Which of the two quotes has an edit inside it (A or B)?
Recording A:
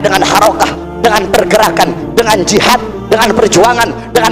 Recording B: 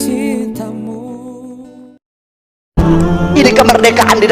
B